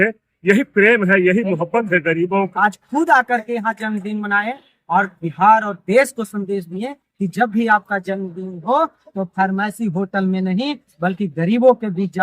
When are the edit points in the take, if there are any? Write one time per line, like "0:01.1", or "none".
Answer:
0:02.5